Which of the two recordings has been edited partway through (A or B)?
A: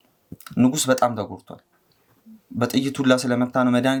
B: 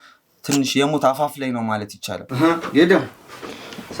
B